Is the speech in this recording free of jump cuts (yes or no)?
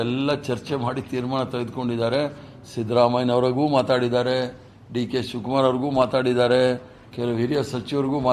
yes